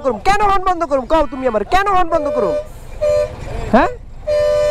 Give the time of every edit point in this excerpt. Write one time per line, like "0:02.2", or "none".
none